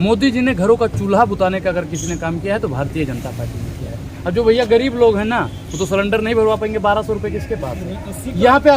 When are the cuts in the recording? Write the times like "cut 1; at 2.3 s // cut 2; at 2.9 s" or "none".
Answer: none